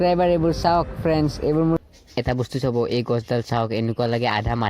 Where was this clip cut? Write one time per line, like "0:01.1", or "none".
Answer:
0:01.8